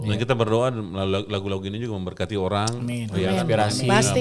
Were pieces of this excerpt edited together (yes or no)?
no